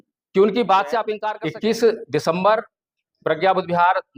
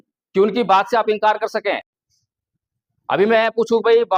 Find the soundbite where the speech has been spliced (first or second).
first